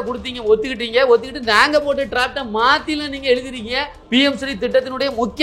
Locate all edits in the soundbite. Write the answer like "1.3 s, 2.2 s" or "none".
3.9 s